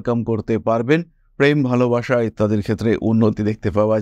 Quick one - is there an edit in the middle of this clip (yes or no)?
no